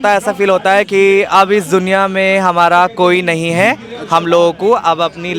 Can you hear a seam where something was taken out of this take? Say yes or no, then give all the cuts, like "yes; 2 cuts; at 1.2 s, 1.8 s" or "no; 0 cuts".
no; 0 cuts